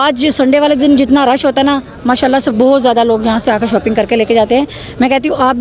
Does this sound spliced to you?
no; 0 cuts

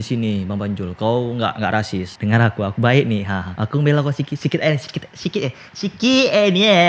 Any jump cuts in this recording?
no; 0 cuts

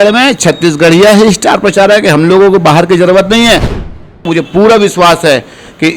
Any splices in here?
yes; 1 cut; at 3.9 s

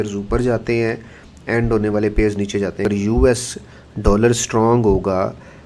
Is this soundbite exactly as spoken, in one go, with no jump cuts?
no; 1 cut; at 2.8 s

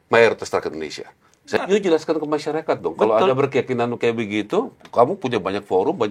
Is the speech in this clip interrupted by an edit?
yes; 1 cut; at 1.6 s

